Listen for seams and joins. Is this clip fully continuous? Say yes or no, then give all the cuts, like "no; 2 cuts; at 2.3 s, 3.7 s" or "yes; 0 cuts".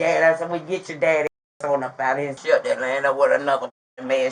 no; 1 cut; at 2.4 s